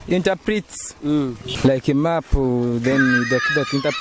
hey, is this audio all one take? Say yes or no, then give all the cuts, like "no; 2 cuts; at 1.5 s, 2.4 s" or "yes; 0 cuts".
no; 1 cut; at 1.5 s